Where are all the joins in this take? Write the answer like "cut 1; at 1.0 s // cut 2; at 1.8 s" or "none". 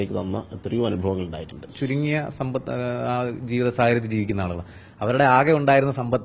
cut 1; at 1.7 s